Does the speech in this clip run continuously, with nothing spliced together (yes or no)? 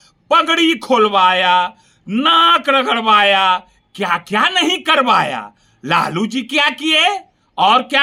yes